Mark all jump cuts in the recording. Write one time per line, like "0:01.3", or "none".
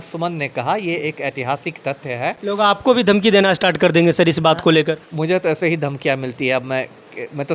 none